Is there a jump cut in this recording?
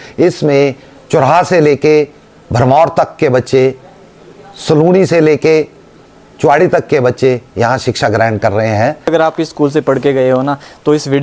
yes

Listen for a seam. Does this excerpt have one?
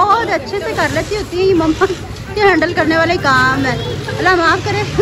no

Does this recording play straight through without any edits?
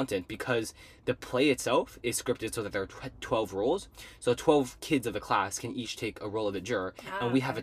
yes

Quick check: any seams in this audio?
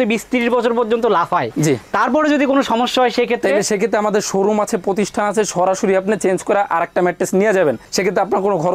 no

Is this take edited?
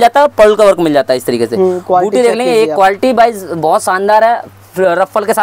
no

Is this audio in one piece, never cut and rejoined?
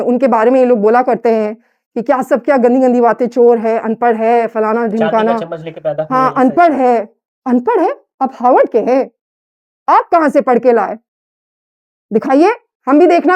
yes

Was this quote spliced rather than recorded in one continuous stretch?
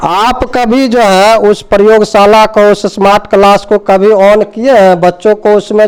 no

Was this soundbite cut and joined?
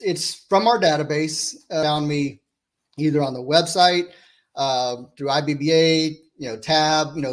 yes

